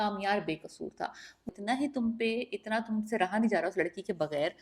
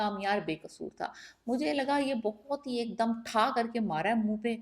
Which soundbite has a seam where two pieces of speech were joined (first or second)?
first